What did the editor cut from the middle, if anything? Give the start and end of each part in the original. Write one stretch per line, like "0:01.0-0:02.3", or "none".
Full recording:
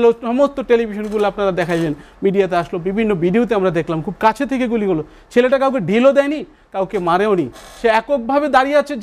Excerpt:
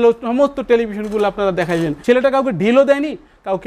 0:02.0-0:05.2